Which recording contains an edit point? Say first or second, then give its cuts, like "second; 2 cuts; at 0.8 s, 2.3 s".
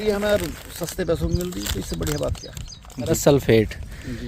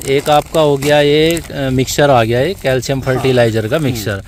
first; 1 cut; at 3.2 s